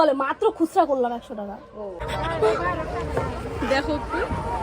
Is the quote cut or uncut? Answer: cut